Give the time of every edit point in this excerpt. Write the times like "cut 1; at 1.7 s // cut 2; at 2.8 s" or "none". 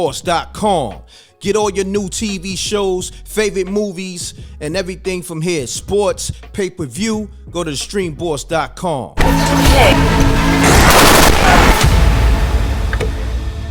none

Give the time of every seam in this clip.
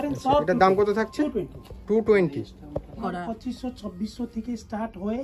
cut 1; at 3.0 s

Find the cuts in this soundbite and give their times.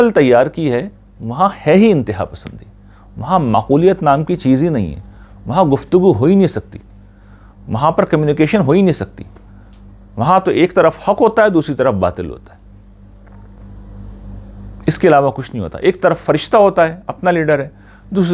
none

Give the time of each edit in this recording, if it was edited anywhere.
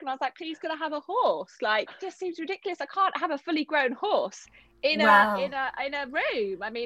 cut 1; at 2.0 s

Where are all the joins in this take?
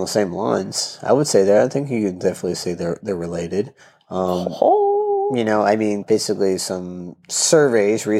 cut 1; at 6.0 s

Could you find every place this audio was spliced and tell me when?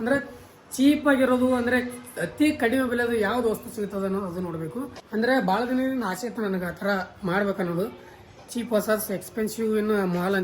cut 1; at 5.0 s

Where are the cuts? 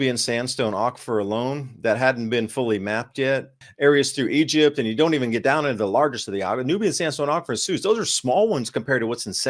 cut 1; at 3.6 s

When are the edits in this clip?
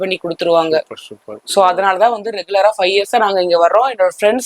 none

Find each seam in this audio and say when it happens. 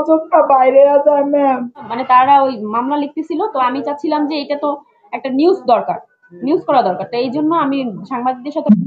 cut 1; at 1.9 s

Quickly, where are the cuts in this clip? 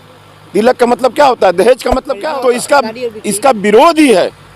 cut 1; at 2.1 s

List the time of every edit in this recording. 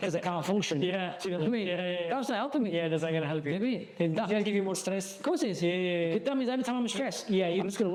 none

